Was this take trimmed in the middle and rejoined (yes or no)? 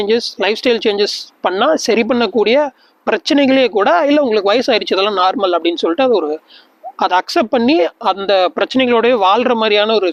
no